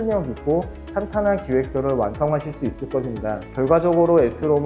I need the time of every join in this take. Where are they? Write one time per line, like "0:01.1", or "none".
0:03.4